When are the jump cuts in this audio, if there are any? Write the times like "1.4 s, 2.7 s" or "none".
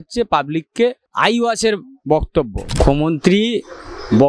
1.0 s, 2.6 s